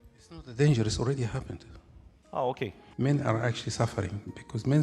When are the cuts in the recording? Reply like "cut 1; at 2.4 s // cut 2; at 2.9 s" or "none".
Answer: cut 1; at 2.8 s

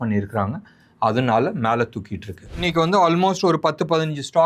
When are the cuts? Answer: cut 1; at 2.6 s

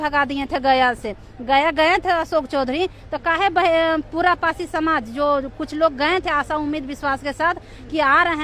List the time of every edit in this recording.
none

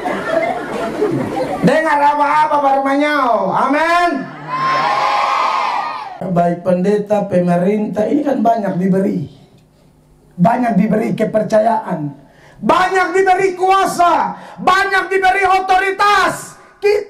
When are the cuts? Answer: cut 1; at 6.2 s

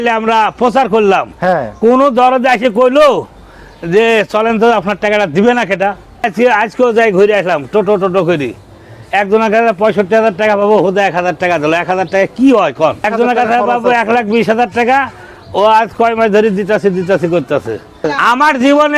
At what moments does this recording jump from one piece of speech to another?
cut 1; at 6.2 s // cut 2; at 13.1 s // cut 3; at 18.1 s

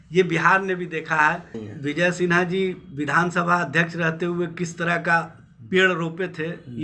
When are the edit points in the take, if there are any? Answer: cut 1; at 1.6 s

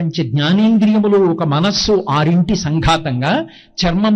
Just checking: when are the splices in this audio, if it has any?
none

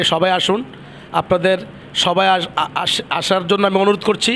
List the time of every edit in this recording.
none

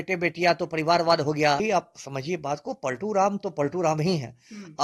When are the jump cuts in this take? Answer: cut 1; at 1.6 s

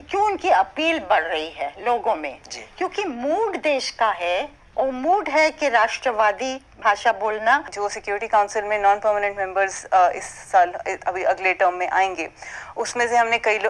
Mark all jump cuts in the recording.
cut 1; at 7.7 s

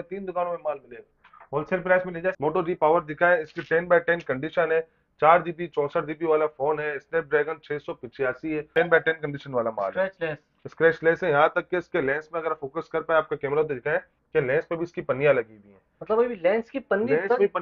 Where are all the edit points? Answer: cut 1; at 2.4 s // cut 2; at 8.7 s

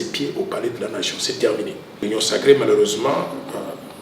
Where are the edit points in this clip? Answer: cut 1; at 2.0 s

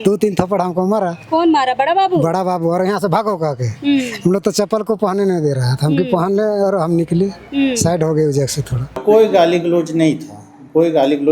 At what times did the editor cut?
cut 1; at 9.0 s

